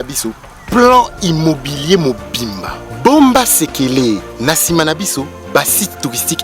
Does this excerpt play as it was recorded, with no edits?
yes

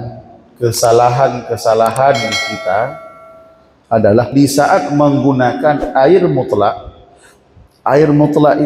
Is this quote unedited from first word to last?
no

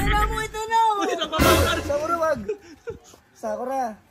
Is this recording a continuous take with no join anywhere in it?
yes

